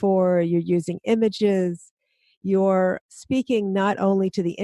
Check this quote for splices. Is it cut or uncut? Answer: cut